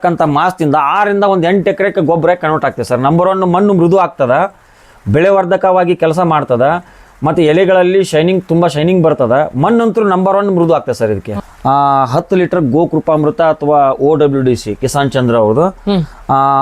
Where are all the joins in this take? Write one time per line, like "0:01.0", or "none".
0:11.4